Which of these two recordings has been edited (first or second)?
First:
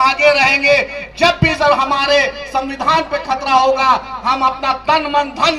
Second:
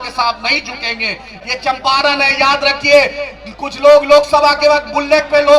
second